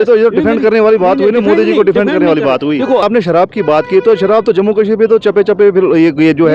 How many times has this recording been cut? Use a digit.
1